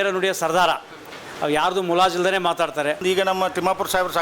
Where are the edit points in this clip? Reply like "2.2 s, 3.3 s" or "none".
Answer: 3.0 s